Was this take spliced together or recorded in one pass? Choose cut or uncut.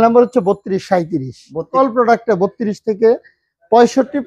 cut